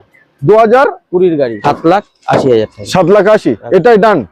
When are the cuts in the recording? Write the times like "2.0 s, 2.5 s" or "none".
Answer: 1.6 s